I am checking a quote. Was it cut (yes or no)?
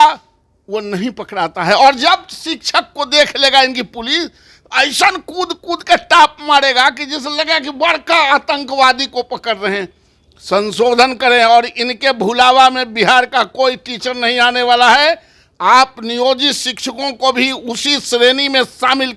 no